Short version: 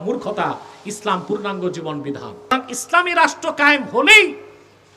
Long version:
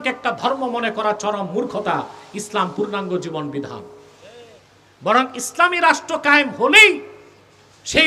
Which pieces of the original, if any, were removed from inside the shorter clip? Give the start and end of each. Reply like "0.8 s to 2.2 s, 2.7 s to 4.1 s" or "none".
4.2 s to 5.4 s